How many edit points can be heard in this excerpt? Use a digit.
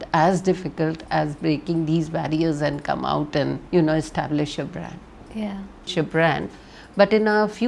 2